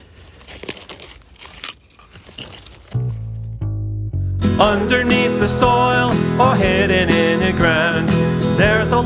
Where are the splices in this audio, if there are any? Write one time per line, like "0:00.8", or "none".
0:02.9

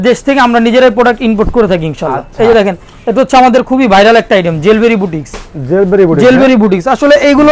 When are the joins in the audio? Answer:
none

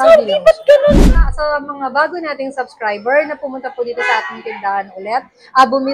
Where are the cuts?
0:01.1

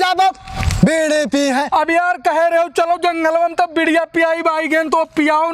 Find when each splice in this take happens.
none

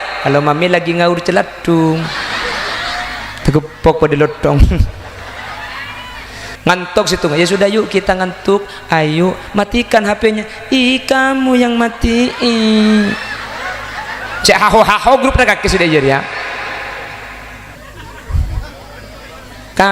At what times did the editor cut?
0:06.5
0:17.7

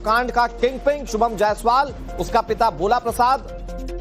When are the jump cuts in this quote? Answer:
0:01.0

